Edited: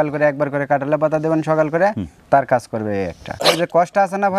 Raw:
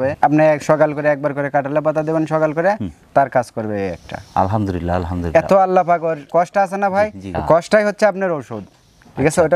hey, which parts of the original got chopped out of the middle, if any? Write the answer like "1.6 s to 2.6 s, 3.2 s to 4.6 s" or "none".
4.3 s to 6.1 s